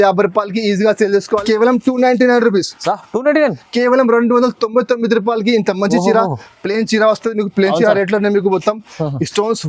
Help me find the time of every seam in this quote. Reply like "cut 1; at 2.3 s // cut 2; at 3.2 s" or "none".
cut 1; at 1.4 s